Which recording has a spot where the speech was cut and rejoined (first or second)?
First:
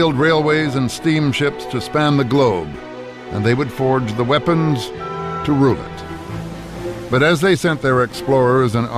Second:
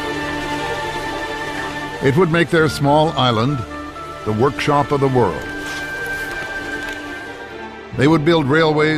second